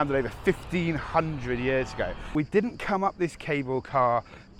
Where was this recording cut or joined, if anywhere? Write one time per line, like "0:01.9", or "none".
0:02.3